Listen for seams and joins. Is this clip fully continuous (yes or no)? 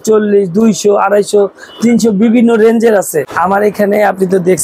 no